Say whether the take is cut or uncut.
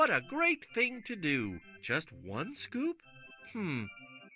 uncut